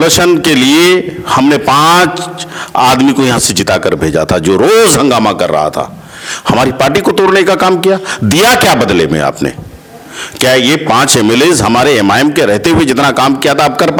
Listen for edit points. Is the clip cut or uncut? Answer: uncut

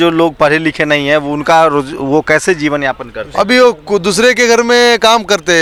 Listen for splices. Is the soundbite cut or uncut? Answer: uncut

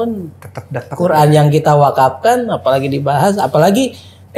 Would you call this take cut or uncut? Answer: uncut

